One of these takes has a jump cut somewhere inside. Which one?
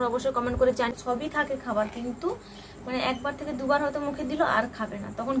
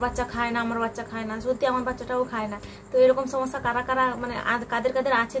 first; 1 cut; at 0.9 s

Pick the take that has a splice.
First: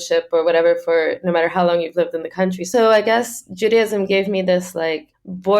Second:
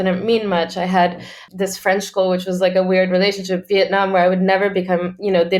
first; 1 cut; at 2.7 s

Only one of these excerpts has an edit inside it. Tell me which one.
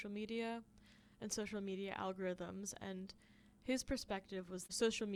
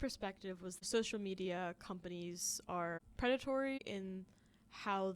second; 1 cut; at 3.0 s

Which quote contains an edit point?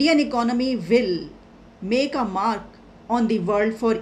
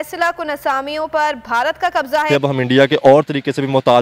second; 1 cut; at 2.3 s

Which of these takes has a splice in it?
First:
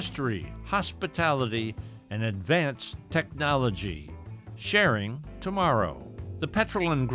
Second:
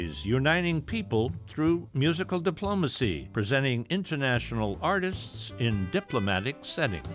second; 1 cut; at 3.2 s

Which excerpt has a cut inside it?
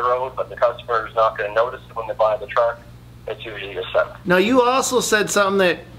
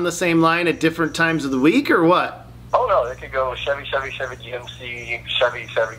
first; 1 cut; at 4.2 s

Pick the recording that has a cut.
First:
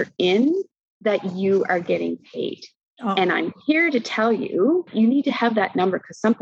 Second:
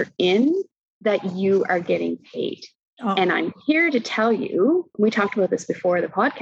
first; 1 cut; at 4.9 s

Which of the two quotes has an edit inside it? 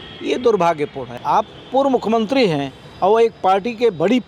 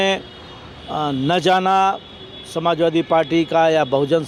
first; 1 cut; at 1.1 s

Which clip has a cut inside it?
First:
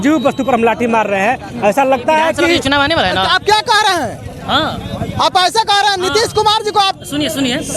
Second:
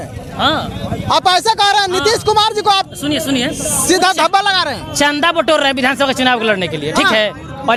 first; 1 cut; at 2.6 s

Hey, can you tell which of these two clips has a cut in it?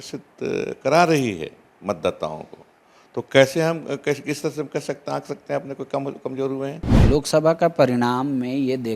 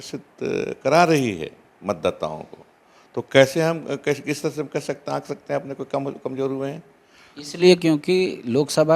first; 1 cut; at 7.0 s

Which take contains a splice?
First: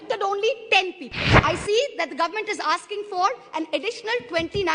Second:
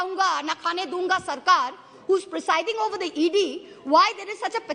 first; 1 cut; at 1.3 s

